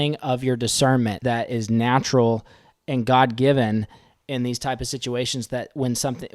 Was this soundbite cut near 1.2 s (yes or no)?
yes